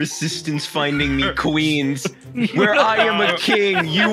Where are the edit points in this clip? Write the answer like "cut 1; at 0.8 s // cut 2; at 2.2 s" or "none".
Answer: none